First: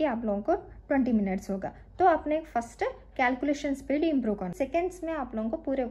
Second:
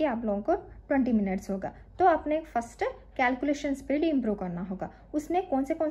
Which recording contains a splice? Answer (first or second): first